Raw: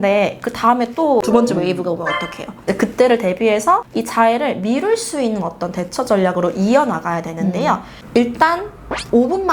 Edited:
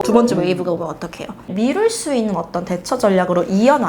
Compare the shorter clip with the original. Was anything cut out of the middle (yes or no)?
yes